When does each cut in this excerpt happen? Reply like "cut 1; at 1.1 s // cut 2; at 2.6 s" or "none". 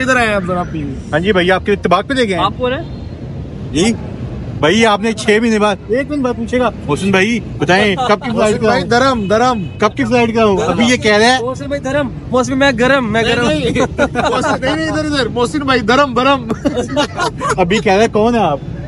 none